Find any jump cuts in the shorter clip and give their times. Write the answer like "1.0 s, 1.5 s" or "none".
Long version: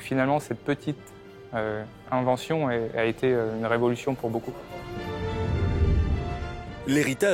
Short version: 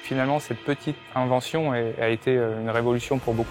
1.0 s